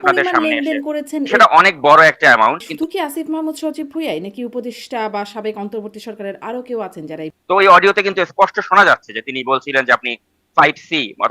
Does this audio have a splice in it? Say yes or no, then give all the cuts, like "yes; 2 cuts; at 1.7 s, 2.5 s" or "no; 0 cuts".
yes; 3 cuts; at 1.3 s, 2.7 s, 7.3 s